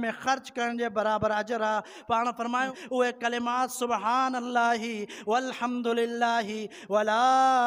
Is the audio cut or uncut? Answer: cut